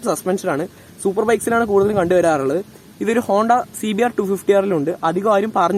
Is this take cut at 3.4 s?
no; 0 cuts

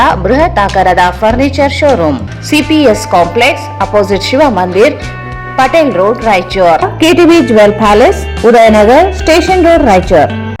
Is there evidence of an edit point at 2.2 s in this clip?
yes; 1 cut; at 2.2 s

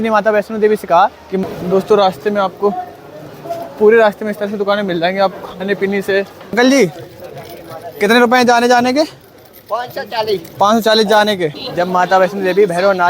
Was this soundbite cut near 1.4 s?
yes; 3 cuts; at 1.4 s, 6.5 s, 11.6 s

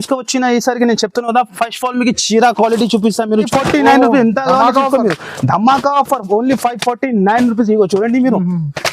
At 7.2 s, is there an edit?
no; 1 cut; at 3.5 s

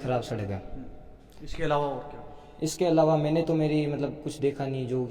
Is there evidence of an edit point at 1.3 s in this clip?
no; 0 cuts

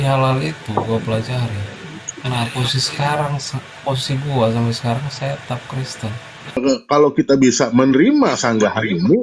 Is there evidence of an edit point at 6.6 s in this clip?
yes; 1 cut; at 6.6 s

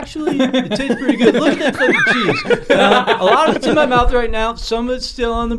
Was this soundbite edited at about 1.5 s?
no; 0 cuts

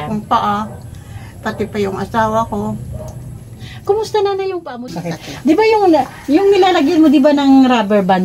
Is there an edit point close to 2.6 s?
no; 1 cut; at 4.6 s

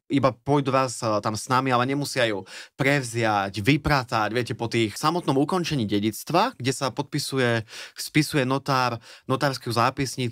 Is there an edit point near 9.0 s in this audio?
no; 1 cut; at 4.9 s

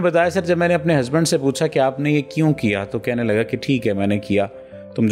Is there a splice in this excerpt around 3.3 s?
no; 0 cuts

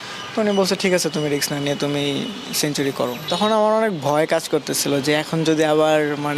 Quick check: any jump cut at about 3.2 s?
yes; 1 cut; at 3.2 s

